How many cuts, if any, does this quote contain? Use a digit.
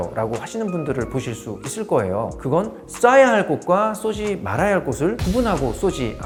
0